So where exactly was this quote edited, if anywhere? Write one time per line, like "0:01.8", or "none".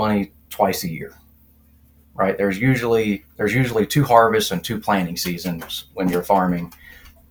none